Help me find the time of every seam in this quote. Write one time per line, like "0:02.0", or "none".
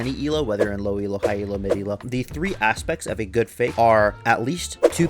0:02.0
0:03.7